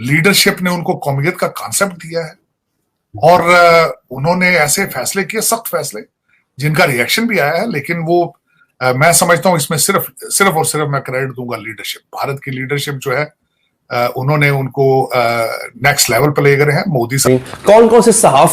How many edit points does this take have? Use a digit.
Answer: 1